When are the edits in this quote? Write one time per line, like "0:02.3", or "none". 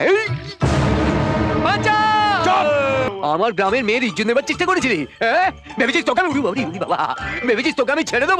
0:03.1